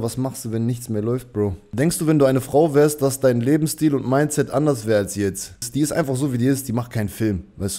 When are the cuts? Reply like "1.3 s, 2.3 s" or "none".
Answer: 1.6 s, 5.7 s